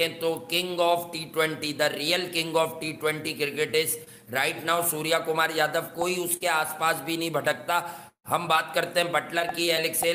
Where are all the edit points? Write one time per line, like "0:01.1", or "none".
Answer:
none